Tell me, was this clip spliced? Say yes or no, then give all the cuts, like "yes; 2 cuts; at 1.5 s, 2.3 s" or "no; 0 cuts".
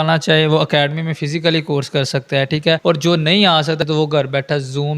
yes; 2 cuts; at 2.8 s, 3.8 s